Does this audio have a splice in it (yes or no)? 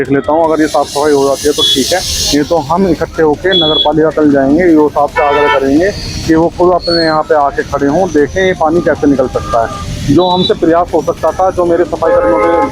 no